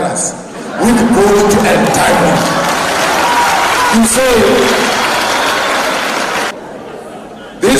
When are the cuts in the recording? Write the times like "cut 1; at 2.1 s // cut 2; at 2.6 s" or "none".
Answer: cut 1; at 6.5 s